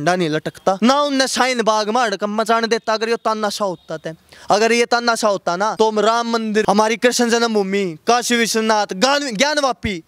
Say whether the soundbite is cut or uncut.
cut